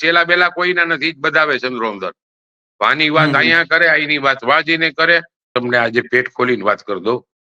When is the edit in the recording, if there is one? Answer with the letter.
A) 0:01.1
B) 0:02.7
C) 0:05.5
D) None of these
C